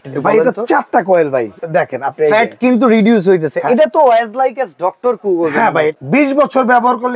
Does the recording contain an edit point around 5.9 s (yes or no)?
yes